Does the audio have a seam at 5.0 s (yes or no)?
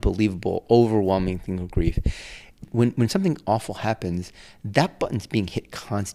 no